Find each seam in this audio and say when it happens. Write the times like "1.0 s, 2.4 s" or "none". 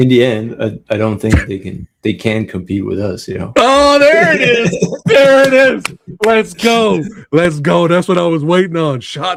none